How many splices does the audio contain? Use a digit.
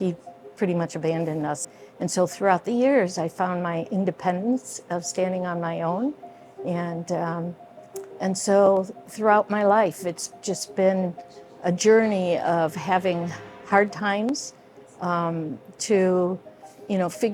1